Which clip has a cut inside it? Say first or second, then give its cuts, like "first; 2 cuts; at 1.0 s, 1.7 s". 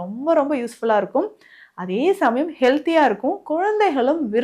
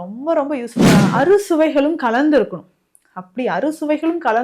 second; 1 cut; at 1.1 s